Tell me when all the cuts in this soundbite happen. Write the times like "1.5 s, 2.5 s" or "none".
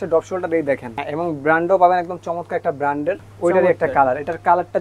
1.0 s, 3.3 s